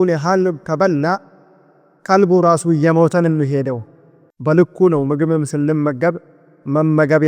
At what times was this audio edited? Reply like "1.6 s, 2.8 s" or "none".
4.2 s